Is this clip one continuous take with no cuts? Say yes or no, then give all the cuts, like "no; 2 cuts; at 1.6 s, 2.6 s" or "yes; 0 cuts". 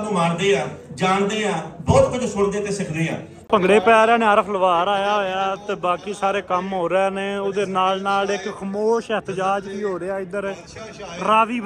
no; 1 cut; at 3.5 s